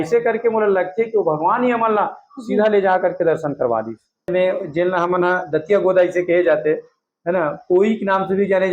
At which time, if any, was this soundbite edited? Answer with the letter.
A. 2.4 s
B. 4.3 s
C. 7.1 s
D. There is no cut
B